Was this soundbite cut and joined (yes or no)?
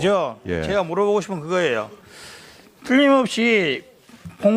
no